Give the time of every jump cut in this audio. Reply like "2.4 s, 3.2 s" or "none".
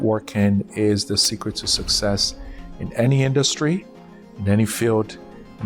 none